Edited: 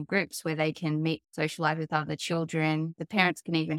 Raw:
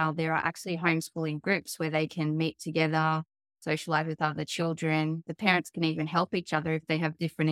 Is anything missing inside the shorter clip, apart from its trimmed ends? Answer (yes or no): yes